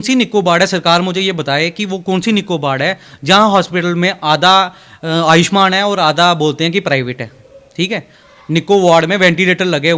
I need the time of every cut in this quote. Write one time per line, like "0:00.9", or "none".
none